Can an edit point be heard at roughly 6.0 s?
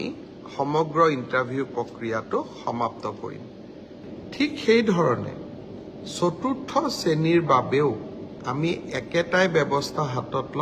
no; 1 cut; at 4.0 s

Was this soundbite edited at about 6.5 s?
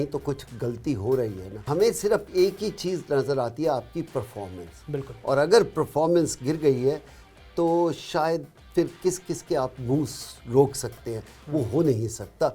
no; 1 cut; at 1.5 s

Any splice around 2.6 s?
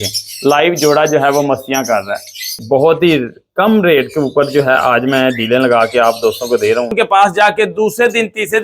yes; 2 cuts; at 2.6 s, 6.9 s

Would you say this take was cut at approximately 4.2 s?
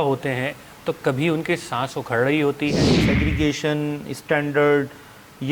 no; 1 cut; at 2.9 s

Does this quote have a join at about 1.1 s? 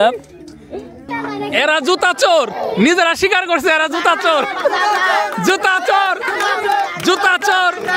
yes; 1 cut; at 1.1 s

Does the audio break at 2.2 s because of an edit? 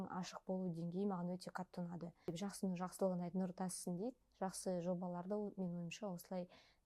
yes; 1 cut; at 2.2 s

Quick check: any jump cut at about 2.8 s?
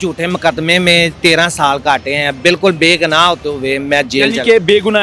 no; 1 cut; at 1.1 s

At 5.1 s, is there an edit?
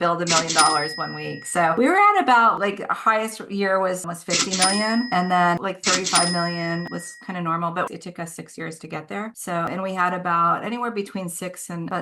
no; 0 cuts

